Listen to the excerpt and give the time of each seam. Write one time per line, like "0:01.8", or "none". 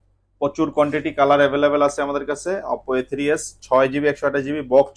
none